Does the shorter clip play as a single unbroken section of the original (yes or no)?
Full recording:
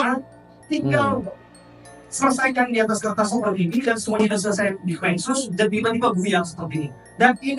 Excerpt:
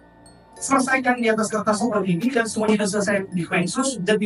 yes